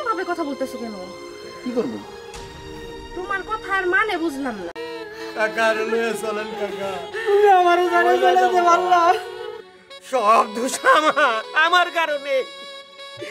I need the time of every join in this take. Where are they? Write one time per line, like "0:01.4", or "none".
0:04.8

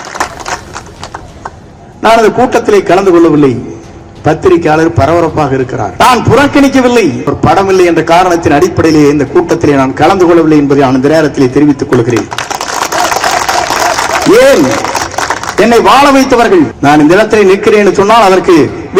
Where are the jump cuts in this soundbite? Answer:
0:01.7
0:05.9
0:07.3
0:16.7

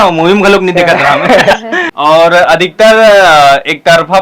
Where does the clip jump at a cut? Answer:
0:01.9

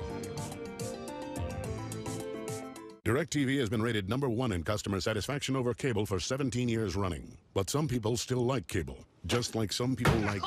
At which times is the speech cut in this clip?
0:02.8

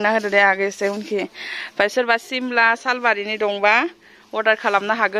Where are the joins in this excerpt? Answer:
none

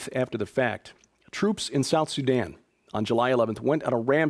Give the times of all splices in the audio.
none

